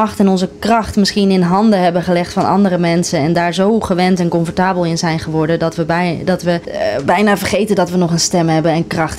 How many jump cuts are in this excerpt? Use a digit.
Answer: 1